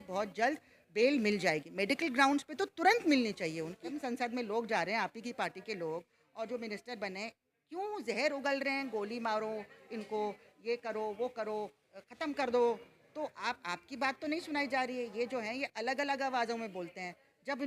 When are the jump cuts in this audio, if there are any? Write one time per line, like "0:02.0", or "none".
0:03.9

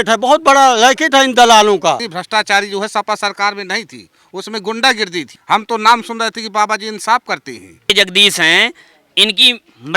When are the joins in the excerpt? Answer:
0:02.1
0:05.3
0:07.9

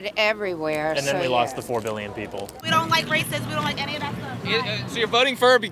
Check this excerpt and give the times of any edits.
0:02.5

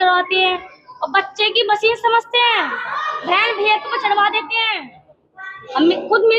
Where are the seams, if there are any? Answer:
none

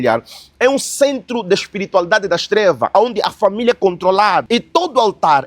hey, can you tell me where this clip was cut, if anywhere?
0:04.5

